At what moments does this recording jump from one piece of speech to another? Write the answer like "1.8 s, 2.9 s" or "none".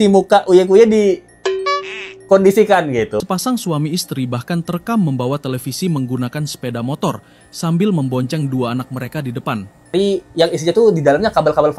3.1 s, 9.9 s